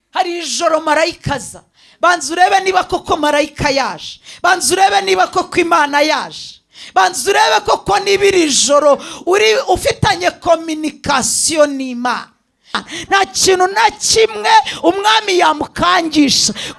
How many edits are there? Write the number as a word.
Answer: one